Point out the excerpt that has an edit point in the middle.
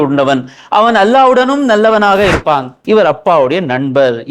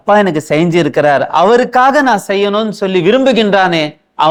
first; 1 cut; at 2.7 s

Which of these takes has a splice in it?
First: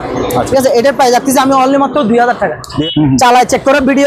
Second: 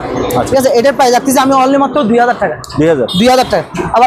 first; 1 cut; at 2.7 s

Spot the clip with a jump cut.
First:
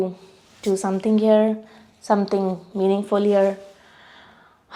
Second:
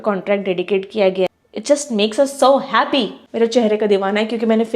second; 2 cuts; at 1.3 s, 3.2 s

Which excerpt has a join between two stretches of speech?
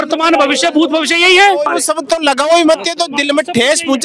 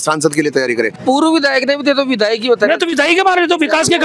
second; 1 cut; at 1.0 s

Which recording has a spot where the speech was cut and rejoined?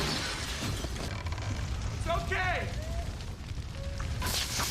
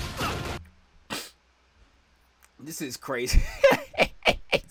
first; 1 cut; at 1.2 s

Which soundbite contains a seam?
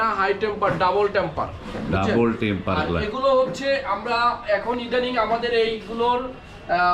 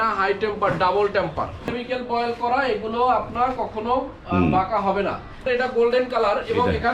second; 2 cuts; at 1.7 s, 5.5 s

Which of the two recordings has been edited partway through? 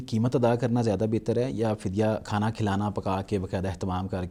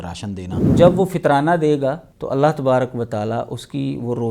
second; 2 cuts; at 0.7 s, 2.1 s

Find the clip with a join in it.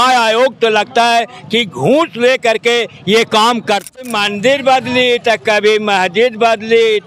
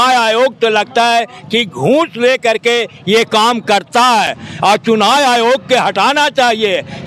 first; 1 cut; at 4.0 s

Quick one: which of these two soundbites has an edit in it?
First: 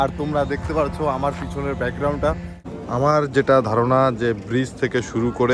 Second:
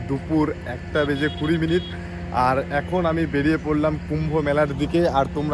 first; 1 cut; at 2.7 s

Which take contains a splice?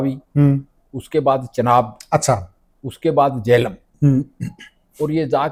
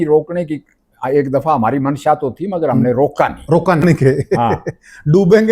second; 1 cut; at 3.8 s

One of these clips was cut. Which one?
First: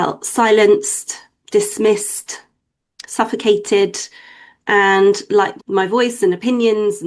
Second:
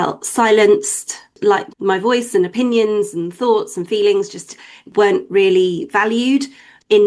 second; 2 cuts; at 1.4 s, 4.9 s

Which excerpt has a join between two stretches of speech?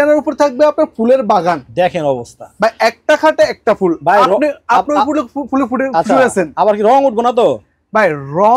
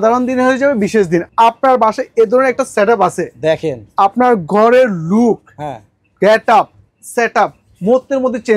second; 1 cut; at 1.3 s

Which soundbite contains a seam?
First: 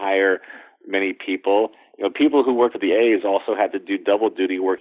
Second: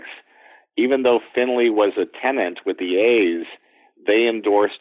first; 1 cut; at 2.8 s

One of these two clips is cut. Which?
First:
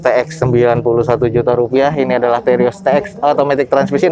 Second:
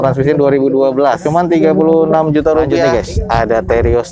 second; 2 cuts; at 1.2 s, 2.8 s

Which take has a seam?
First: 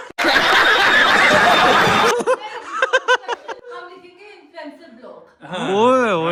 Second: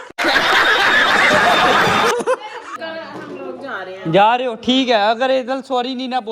second; 1 cut; at 2.7 s

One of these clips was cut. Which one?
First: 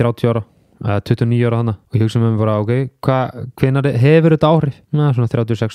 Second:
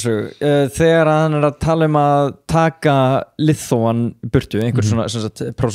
first; 2 cuts; at 1.8 s, 4.8 s

